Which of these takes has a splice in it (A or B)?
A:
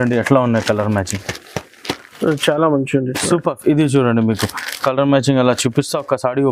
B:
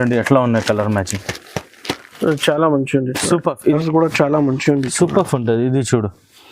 B